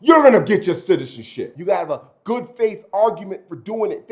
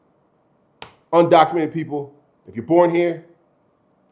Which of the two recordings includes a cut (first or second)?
first